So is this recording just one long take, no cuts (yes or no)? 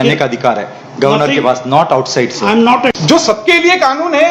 no